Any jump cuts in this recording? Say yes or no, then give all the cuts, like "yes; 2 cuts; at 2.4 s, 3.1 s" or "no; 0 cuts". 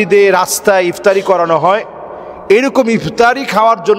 no; 0 cuts